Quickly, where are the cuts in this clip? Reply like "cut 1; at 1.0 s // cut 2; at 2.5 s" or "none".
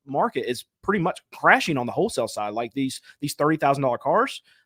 none

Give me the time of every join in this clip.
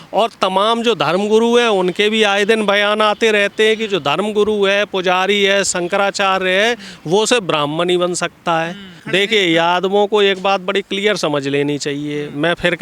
cut 1; at 9.0 s

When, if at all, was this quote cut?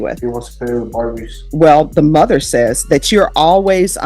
cut 1; at 1.4 s

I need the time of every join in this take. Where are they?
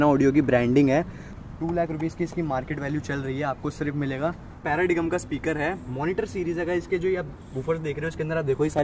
cut 1; at 1.2 s // cut 2; at 4.6 s

